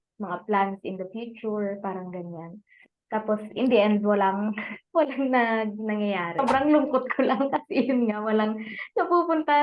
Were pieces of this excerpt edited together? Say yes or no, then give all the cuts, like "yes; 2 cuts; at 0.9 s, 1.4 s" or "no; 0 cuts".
yes; 1 cut; at 6.4 s